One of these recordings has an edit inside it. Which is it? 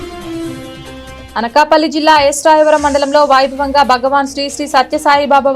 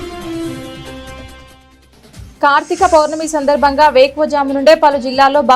first; 1 cut; at 1.2 s

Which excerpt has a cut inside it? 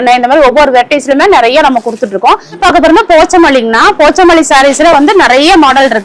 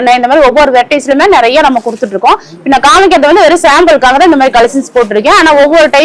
first; 1 cut; at 2.6 s

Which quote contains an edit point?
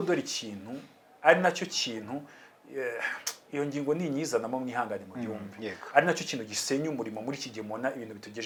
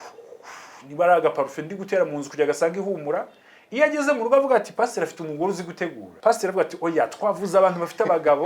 second; 1 cut; at 6.0 s

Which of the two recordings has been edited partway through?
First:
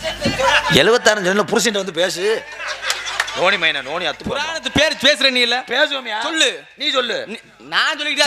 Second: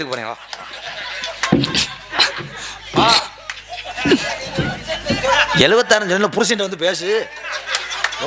first; 1 cut; at 4.6 s

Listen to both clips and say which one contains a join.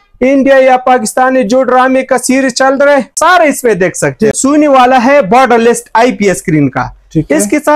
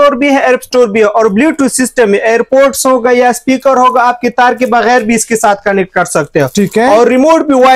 first; 2 cuts; at 3.1 s, 4.4 s

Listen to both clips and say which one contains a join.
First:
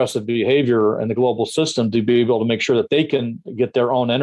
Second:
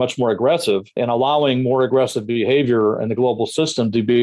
second; 1 cut; at 0.9 s

